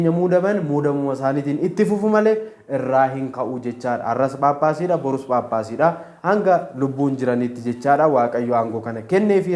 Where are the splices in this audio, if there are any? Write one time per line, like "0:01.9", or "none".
none

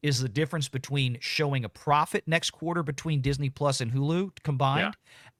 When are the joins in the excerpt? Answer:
none

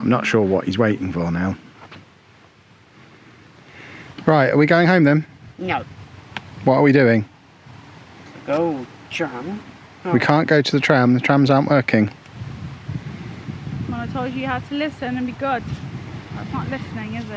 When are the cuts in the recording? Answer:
0:03.7

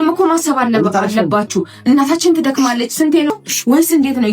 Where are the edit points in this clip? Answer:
0:03.3

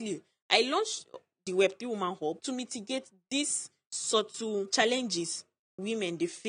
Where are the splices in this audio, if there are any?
0:02.4
0:04.7

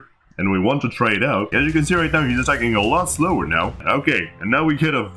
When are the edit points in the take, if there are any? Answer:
0:01.5
0:03.8

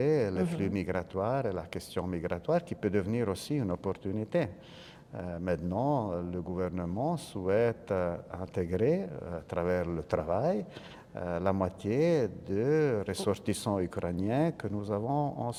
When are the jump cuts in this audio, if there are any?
none

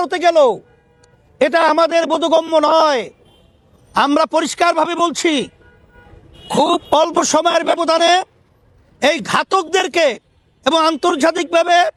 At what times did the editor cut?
none

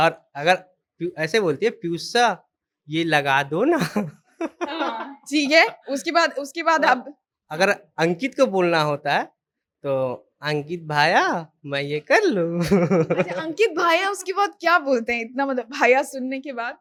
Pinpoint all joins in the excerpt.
none

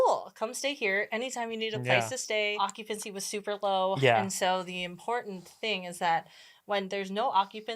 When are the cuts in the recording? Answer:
0:02.6

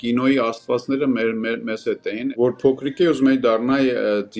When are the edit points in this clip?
0:02.3

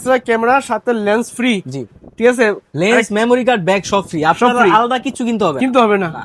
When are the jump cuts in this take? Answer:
none

